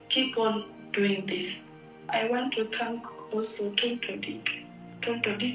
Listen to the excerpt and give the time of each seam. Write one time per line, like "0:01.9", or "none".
0:02.1